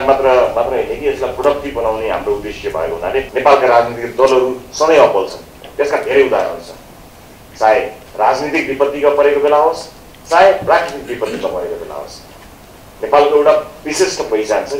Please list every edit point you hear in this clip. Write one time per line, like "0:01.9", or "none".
0:03.3